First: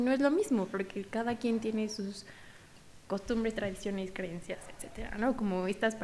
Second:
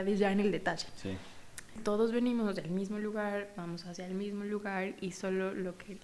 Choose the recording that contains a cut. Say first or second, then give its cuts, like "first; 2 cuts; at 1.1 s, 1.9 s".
second; 1 cut; at 1.8 s